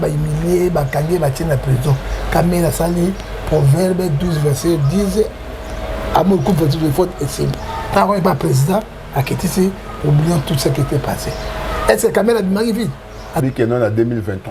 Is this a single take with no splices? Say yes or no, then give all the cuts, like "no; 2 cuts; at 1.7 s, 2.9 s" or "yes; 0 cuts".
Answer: no; 1 cut; at 13.4 s